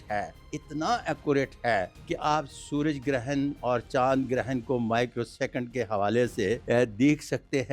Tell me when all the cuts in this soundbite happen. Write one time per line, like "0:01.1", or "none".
0:02.0
0:06.6